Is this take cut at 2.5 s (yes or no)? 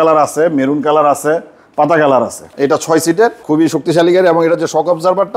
yes